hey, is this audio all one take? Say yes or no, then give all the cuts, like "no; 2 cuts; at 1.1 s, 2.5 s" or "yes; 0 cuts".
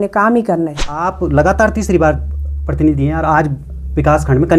no; 1 cut; at 1.1 s